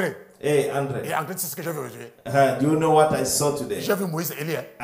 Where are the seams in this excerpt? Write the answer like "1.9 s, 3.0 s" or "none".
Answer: none